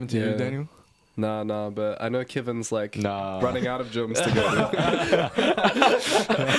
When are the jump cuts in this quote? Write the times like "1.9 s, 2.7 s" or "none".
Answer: none